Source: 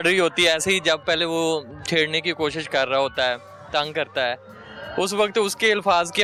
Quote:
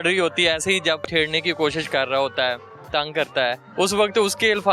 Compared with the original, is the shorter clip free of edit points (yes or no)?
no